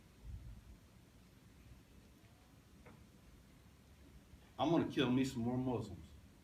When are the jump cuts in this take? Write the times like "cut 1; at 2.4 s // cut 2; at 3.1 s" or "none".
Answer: none